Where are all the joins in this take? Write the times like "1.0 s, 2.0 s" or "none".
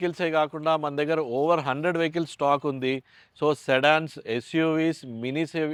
none